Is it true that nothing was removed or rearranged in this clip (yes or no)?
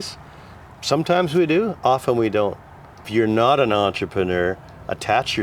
no